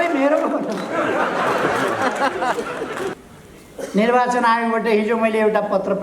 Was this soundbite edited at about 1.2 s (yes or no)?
no